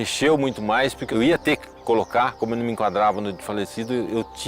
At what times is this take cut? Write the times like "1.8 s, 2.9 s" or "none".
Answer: 1.1 s